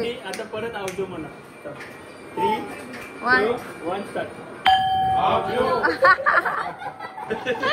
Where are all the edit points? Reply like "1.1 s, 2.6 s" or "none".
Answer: none